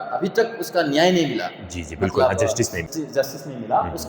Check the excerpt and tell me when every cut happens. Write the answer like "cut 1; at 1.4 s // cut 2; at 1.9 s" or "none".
cut 1; at 2.9 s